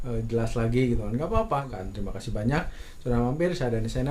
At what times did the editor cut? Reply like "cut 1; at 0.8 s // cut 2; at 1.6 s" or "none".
none